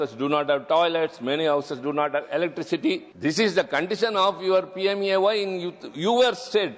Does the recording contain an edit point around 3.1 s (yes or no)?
yes